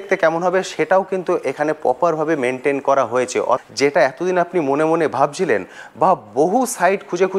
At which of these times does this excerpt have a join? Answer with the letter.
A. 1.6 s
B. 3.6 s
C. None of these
B